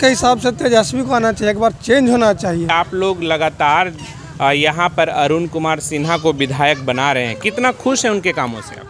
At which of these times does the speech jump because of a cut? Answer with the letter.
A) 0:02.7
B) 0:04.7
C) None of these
A